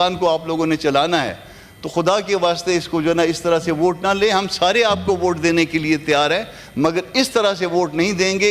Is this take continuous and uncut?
yes; 0 cuts

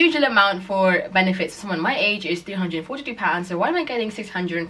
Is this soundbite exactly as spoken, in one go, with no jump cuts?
yes; 0 cuts

